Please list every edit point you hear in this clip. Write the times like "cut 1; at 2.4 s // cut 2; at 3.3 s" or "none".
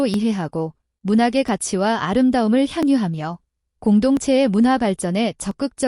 cut 1; at 1.5 s